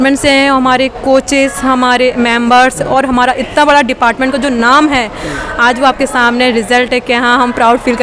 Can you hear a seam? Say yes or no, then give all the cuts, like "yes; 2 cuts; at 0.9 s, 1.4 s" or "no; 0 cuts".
no; 0 cuts